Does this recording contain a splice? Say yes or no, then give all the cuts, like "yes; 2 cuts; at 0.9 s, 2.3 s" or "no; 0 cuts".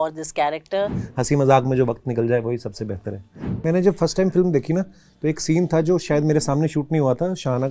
yes; 2 cuts; at 1.0 s, 3.6 s